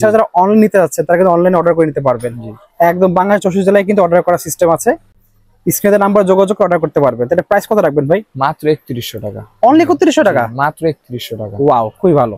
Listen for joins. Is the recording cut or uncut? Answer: uncut